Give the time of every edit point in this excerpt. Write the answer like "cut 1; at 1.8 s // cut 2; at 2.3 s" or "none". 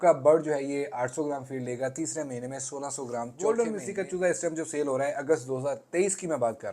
cut 1; at 3.4 s